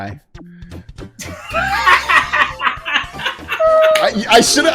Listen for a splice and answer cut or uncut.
uncut